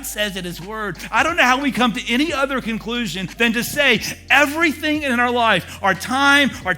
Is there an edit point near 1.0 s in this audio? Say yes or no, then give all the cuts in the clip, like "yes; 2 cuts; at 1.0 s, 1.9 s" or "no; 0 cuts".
yes; 2 cuts; at 1.0 s, 3.3 s